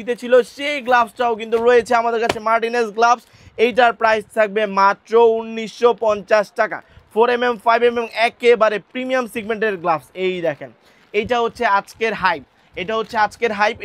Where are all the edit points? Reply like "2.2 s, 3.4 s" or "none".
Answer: none